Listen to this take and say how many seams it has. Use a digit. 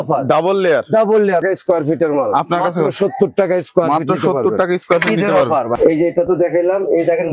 2